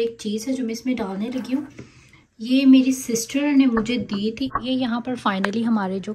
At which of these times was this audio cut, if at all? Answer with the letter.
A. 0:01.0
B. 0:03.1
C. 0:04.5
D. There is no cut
C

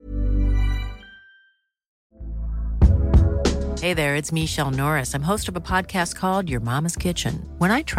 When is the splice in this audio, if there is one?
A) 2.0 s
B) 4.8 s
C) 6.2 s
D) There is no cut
A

